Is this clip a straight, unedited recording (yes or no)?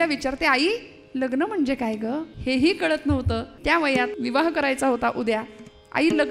no